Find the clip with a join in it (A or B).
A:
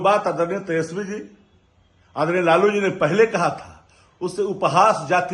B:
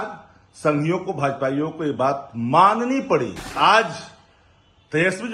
B